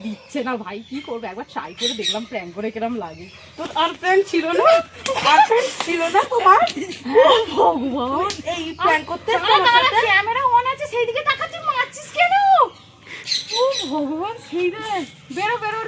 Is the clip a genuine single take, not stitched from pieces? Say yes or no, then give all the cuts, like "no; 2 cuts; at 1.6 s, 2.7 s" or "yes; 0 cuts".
yes; 0 cuts